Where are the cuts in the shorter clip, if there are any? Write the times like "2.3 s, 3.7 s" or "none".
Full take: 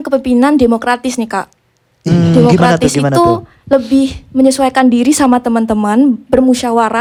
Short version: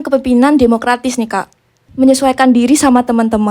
1.8 s